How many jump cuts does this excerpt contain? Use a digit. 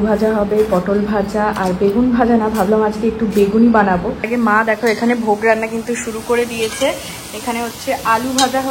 1